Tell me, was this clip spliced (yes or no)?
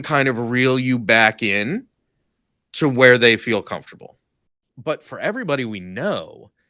yes